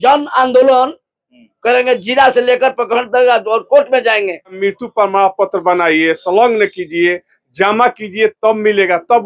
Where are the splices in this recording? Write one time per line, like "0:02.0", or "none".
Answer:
0:04.6